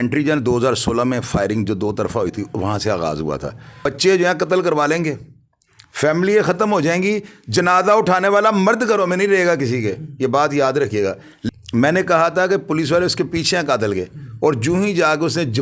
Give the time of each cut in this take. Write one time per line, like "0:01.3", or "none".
0:03.8
0:11.3